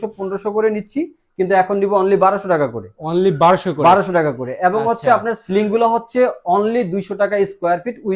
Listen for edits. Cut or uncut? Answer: uncut